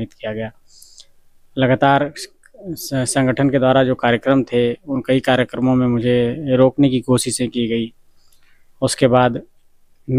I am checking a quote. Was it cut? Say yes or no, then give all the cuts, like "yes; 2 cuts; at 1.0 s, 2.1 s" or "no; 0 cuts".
no; 0 cuts